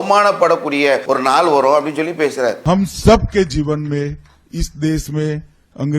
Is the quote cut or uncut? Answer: cut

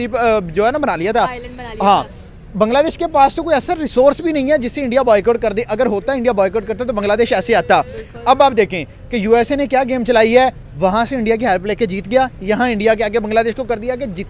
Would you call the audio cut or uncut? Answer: uncut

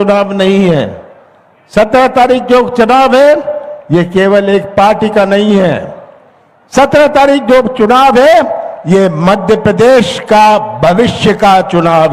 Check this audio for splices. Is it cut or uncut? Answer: uncut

